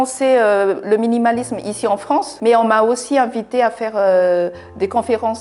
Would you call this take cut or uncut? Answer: cut